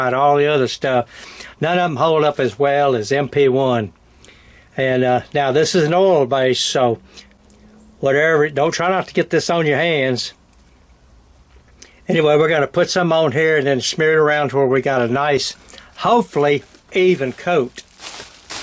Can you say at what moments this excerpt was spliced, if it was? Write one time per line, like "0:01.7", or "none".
none